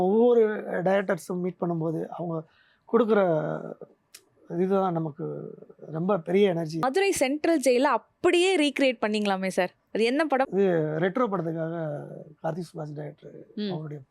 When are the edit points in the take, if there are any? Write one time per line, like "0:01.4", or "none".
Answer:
0:06.8
0:10.5